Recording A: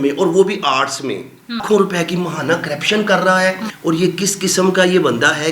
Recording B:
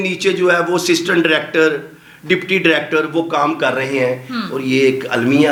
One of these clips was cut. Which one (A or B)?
A